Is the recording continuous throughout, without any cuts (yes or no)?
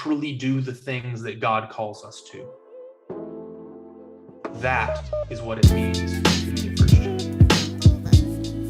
no